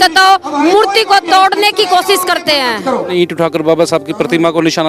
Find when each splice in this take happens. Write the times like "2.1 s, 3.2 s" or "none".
3.1 s